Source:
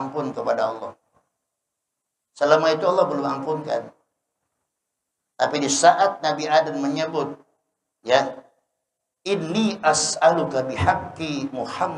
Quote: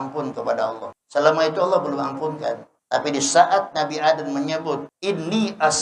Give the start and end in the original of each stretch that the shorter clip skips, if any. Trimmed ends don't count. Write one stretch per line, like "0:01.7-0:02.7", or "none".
0:00.9-0:02.2
0:04.0-0:05.2
0:07.4-0:09.1